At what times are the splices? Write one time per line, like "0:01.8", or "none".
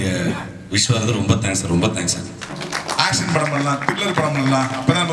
0:02.5